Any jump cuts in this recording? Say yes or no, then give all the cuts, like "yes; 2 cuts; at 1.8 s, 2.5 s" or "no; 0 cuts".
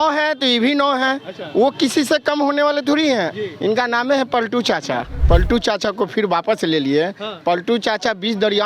yes; 1 cut; at 5.1 s